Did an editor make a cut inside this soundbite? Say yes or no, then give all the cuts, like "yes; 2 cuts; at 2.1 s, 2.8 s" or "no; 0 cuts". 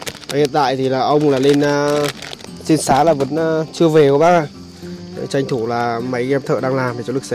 no; 0 cuts